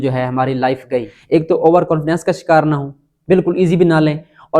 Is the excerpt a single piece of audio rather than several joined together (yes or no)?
no